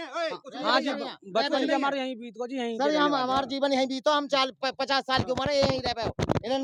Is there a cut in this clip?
no; 0 cuts

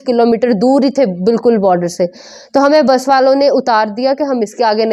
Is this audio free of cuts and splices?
yes; 0 cuts

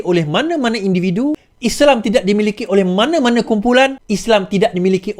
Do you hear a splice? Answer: yes; 2 cuts; at 1.5 s, 4.1 s

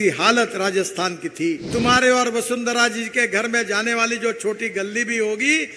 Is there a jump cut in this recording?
yes; 1 cut; at 1.7 s

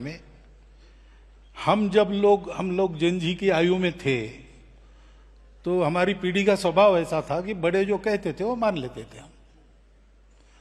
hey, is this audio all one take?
yes; 0 cuts

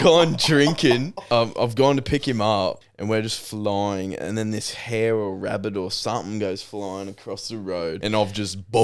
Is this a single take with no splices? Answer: no; 3 cuts; at 1.1 s, 2.9 s, 8.0 s

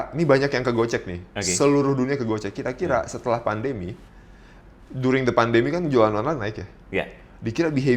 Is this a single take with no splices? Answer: yes; 0 cuts

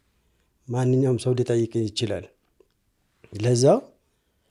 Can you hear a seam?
no; 0 cuts

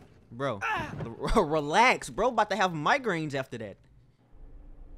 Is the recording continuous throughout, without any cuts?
yes; 0 cuts

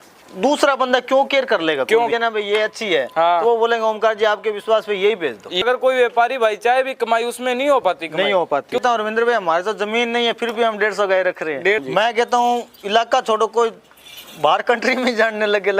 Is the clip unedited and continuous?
no; 4 cuts; at 2.1 s, 5.6 s, 8.8 s, 11.8 s

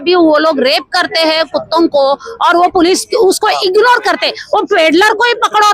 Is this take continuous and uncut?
yes; 0 cuts

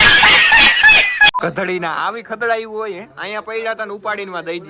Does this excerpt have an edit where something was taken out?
yes; 1 cut; at 1.3 s

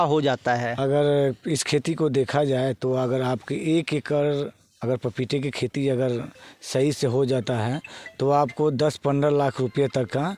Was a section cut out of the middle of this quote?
no; 0 cuts

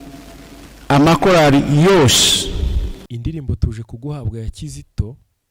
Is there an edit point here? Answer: yes; 1 cut; at 3.0 s

